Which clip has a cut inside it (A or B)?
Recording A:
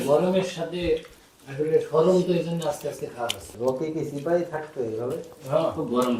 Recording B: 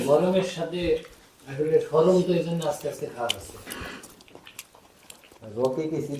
A